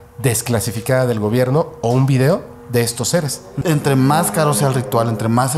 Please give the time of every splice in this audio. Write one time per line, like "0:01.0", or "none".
0:03.5